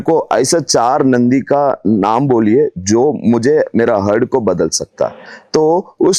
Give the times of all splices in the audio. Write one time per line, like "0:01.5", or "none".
none